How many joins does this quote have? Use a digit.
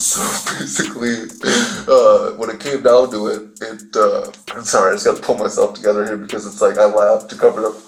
0